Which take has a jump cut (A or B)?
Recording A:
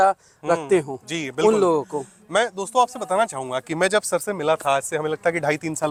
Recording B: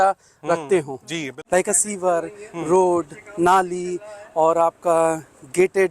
B